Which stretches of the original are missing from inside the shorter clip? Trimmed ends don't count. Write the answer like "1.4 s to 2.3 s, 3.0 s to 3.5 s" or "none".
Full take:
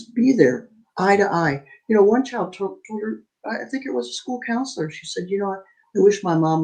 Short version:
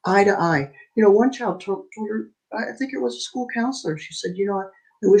none